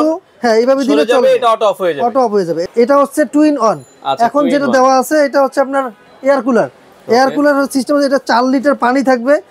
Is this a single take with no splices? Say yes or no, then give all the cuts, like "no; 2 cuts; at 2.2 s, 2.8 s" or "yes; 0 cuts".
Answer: no; 1 cut; at 2.6 s